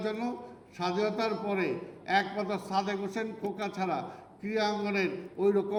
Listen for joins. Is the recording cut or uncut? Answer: uncut